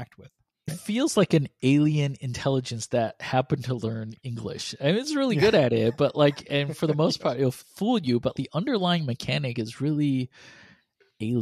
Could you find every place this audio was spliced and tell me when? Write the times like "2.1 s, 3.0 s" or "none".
0.8 s, 8.3 s

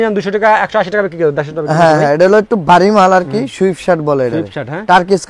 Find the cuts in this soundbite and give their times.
none

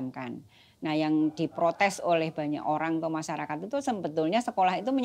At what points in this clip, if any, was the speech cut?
none

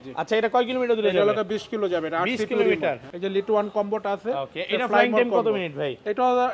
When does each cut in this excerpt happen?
3.1 s

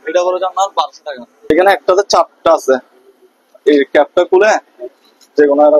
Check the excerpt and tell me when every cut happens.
1.5 s

